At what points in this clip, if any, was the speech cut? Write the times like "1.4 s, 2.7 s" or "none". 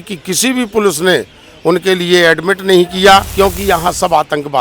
3.3 s